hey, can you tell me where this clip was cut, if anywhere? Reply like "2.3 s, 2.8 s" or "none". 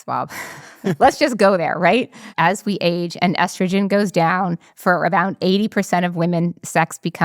0.9 s, 2.2 s